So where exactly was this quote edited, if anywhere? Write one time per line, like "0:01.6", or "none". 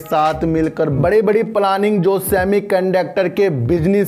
none